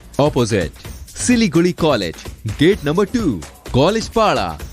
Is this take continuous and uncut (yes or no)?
yes